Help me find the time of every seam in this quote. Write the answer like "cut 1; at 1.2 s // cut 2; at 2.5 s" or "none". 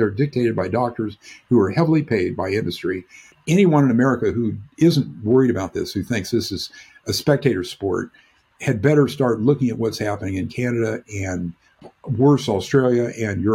cut 1; at 3.3 s